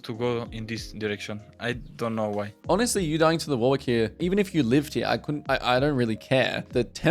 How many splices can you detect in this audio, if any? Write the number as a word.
two